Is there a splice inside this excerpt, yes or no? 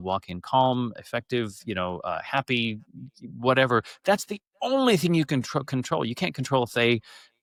no